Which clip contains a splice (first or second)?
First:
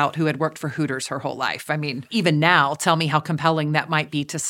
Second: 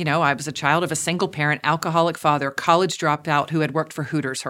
first